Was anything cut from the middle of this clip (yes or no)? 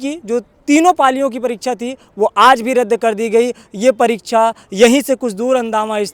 no